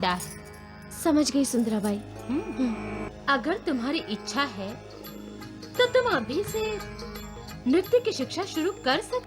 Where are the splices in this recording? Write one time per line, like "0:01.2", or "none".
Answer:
0:03.1